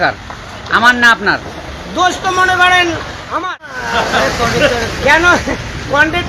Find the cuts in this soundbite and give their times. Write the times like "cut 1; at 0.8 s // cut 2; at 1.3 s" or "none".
cut 1; at 3.8 s